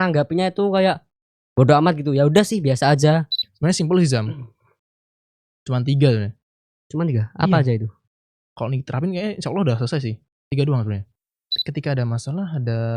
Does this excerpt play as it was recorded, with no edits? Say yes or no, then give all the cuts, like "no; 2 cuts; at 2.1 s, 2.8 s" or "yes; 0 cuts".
no; 2 cuts; at 3.4 s, 11.6 s